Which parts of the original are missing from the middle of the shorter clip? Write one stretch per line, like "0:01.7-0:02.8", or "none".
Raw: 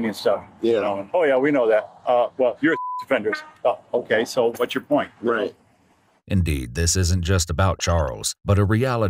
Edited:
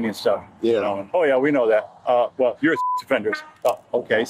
none